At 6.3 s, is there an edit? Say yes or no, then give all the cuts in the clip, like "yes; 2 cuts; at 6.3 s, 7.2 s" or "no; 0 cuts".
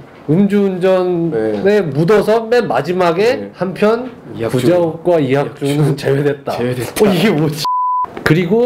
no; 1 cut; at 7.6 s